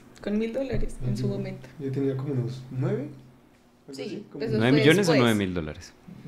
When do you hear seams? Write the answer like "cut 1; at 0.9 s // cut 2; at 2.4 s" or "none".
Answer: none